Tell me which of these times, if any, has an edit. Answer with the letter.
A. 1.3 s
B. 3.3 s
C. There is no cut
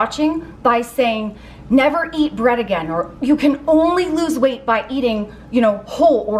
C